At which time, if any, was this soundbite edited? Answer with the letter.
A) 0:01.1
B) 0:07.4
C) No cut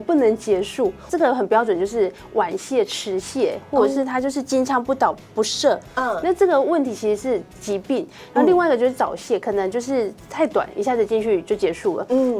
A